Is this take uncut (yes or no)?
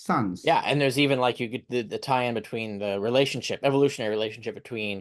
yes